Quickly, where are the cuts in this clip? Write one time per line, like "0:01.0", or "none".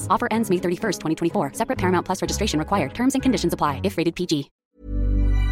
0:04.6